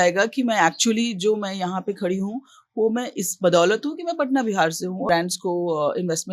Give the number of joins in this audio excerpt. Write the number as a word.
one